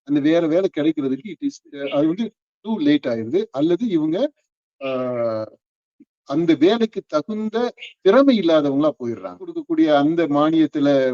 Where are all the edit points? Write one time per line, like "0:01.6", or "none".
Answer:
0:09.6